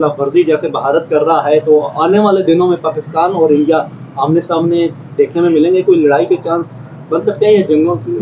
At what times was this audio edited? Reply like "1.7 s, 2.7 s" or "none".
none